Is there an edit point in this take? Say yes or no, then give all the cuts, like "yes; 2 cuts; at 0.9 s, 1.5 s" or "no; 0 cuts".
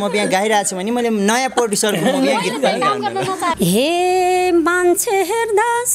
yes; 1 cut; at 3.6 s